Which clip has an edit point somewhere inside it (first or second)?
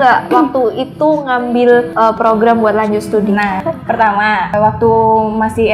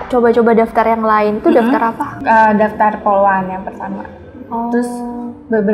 first